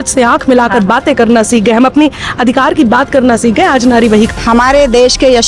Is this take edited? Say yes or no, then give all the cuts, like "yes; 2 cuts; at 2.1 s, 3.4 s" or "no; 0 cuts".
yes; 1 cut; at 4.4 s